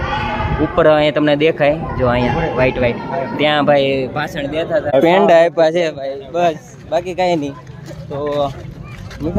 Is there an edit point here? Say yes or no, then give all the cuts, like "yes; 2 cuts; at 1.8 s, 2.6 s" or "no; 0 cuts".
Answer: yes; 1 cut; at 4.9 s